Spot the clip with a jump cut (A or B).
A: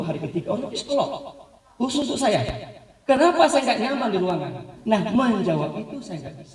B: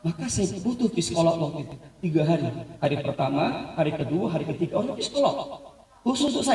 A